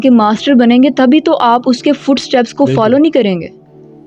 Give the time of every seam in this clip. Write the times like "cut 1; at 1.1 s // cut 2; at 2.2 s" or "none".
none